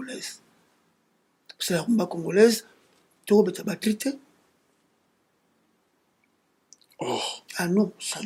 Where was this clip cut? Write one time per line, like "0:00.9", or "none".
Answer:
none